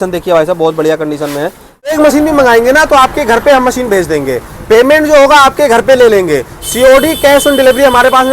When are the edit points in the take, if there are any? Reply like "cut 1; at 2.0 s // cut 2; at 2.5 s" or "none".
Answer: cut 1; at 1.9 s